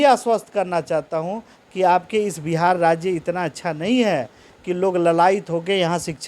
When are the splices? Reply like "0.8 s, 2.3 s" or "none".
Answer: none